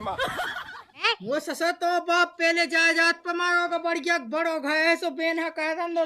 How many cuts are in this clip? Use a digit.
1